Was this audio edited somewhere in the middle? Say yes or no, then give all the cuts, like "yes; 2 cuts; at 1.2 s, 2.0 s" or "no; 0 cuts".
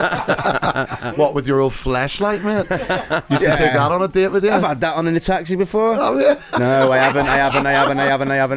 no; 0 cuts